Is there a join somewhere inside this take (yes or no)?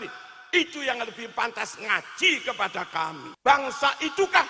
yes